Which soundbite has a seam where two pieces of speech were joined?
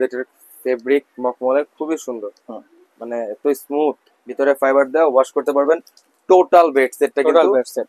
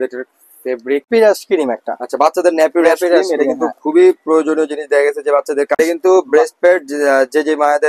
second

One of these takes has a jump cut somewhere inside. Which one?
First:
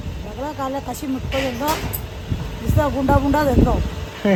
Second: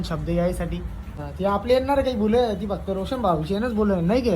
second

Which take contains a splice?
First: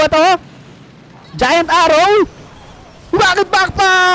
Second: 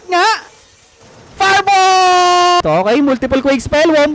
second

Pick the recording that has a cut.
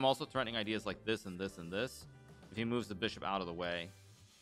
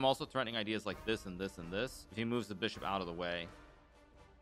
second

